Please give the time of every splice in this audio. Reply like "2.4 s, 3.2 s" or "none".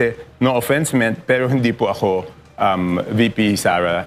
none